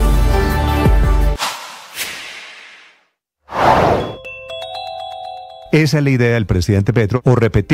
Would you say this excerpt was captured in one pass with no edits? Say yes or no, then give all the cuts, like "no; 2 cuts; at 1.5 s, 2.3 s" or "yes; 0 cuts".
no; 1 cut; at 1.3 s